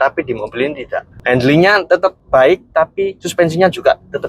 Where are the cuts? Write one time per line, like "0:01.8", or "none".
0:01.1
0:01.9
0:03.2